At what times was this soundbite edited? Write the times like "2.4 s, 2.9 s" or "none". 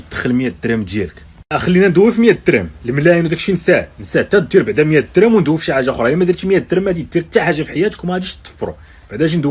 none